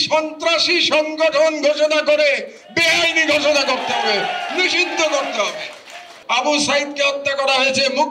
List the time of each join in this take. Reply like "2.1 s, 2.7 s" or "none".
6.1 s